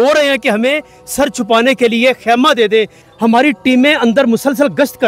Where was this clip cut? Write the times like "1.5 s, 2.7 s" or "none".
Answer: 3.0 s

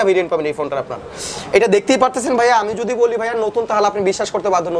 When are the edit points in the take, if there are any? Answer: none

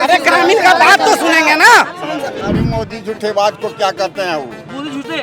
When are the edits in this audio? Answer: 2.4 s

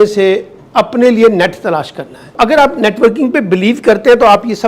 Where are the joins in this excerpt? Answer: 2.4 s

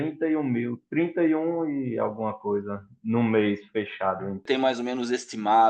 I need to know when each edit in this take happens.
4.4 s

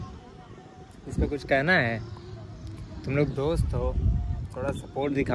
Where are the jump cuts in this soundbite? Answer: none

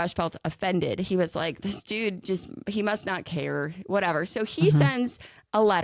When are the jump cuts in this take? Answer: none

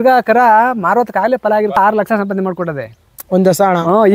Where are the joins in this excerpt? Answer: 1.8 s

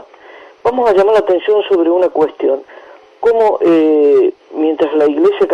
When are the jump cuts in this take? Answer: none

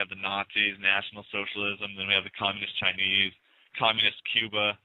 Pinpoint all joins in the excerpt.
none

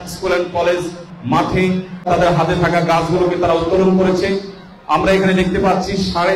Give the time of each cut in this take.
1.1 s, 2.1 s

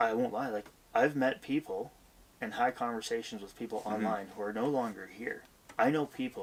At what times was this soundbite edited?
none

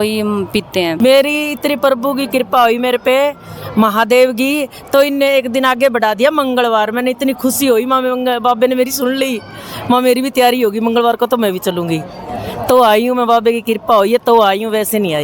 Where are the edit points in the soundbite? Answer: 1.0 s

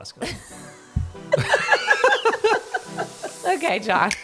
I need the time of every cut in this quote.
3.2 s

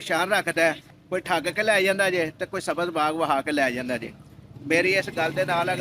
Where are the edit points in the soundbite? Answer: 0.9 s

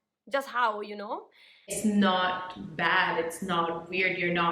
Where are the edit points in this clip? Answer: 1.7 s

